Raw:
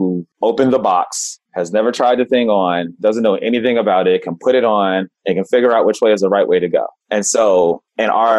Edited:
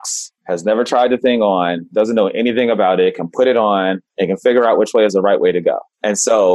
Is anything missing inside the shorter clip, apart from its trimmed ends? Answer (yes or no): no